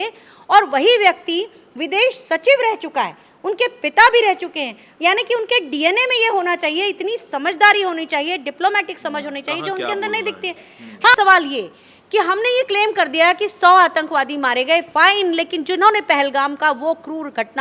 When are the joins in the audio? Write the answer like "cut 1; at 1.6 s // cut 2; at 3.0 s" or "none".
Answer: cut 1; at 11.2 s